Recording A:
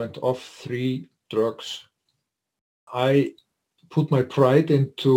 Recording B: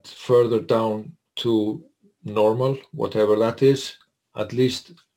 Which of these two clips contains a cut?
A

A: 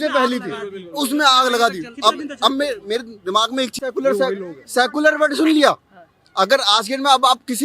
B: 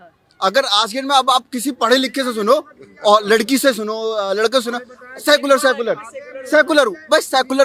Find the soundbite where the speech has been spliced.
A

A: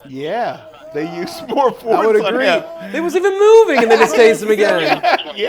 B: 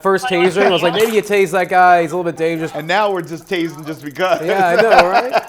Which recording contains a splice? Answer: B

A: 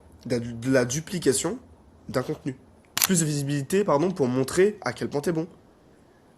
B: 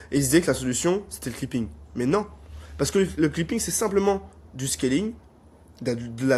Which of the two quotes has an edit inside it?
A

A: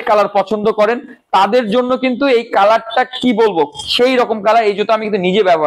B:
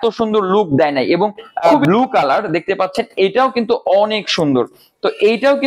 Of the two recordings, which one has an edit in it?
B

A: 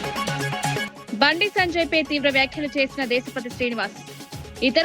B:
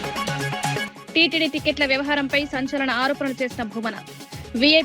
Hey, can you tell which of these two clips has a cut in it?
A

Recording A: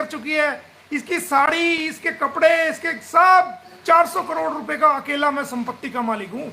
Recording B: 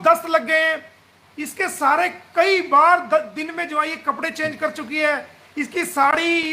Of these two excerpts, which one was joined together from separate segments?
A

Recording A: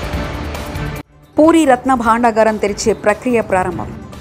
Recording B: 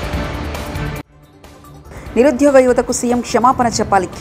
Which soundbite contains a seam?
B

